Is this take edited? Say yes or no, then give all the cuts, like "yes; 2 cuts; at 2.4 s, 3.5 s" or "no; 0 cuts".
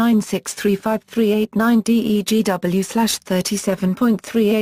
no; 0 cuts